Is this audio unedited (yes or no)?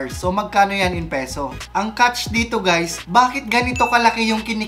no